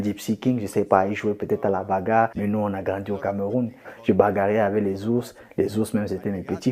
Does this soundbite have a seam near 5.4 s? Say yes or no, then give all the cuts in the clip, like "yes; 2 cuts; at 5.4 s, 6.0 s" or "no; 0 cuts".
no; 2 cuts; at 2.4 s, 3.8 s